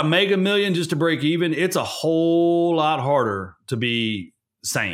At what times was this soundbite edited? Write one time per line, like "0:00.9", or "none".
none